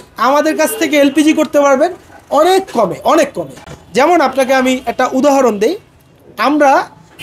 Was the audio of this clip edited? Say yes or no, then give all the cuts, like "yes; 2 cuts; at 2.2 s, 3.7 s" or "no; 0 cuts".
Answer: no; 0 cuts